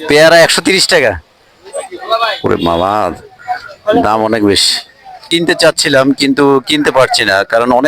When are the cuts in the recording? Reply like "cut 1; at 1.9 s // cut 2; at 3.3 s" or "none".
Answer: cut 1; at 5.3 s